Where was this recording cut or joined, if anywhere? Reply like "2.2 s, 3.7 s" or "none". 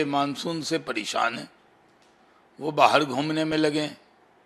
none

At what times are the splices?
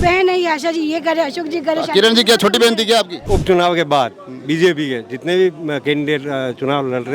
3.2 s

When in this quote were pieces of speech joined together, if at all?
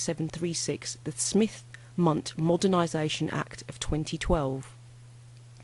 2.9 s

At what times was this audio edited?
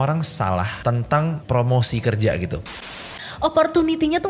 1.0 s, 3.2 s

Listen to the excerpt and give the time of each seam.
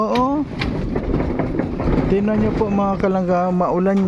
1.0 s

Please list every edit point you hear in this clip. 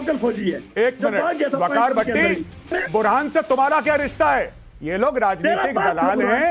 2.7 s

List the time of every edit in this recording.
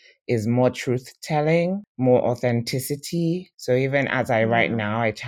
1.9 s, 3.5 s

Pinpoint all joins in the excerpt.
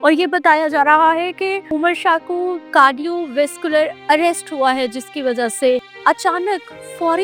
1.7 s, 2.7 s, 4.0 s, 5.9 s

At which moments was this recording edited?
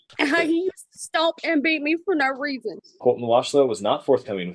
2.8 s

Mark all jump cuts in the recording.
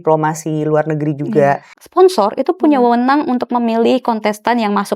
1.8 s

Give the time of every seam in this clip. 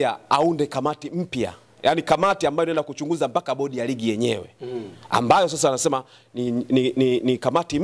none

